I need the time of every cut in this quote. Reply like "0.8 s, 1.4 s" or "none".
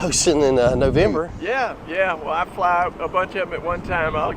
1.3 s